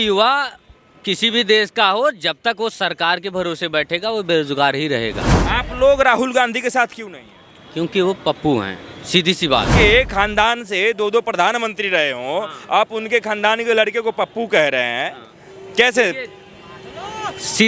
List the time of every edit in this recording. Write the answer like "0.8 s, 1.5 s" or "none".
5.3 s, 9.7 s